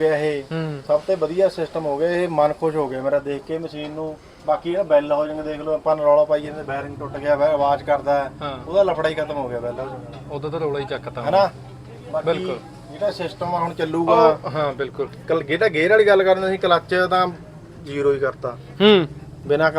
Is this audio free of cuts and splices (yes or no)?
yes